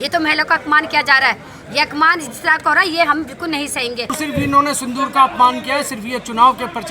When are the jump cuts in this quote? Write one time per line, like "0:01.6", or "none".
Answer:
0:04.1